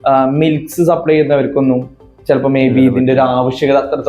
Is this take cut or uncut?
uncut